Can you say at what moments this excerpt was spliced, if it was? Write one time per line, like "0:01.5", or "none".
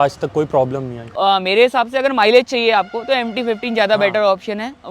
0:01.2